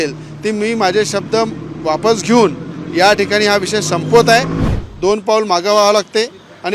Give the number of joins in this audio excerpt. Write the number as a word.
one